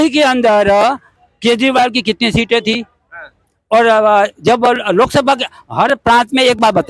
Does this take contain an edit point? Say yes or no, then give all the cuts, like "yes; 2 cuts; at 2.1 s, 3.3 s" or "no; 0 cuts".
no; 0 cuts